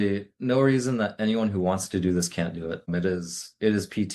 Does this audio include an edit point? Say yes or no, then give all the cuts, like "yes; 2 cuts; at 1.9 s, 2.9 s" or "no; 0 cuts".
yes; 1 cut; at 2.8 s